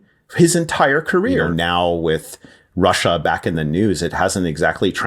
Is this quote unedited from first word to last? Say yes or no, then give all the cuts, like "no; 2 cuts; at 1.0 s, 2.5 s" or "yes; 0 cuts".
no; 1 cut; at 1.5 s